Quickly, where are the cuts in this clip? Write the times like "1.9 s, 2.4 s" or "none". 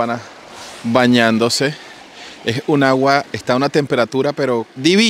none